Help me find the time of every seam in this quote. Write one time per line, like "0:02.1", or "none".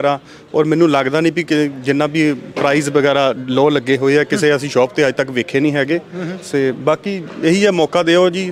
none